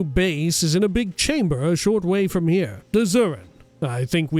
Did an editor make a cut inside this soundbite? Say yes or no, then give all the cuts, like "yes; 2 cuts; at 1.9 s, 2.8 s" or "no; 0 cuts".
yes; 1 cut; at 2.8 s